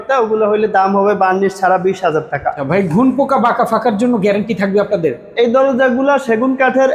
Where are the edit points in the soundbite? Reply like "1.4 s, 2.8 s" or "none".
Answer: 2.6 s